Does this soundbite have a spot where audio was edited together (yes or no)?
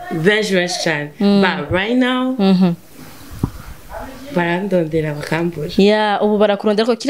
no